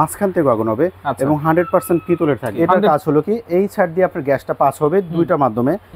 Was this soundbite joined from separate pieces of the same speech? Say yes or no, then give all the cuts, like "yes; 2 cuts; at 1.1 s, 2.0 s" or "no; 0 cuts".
yes; 1 cut; at 2.6 s